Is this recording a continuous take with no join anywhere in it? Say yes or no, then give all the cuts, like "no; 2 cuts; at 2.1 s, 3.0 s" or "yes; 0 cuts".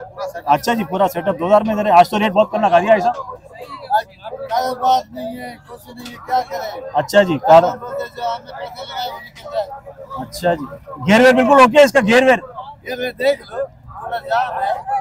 yes; 0 cuts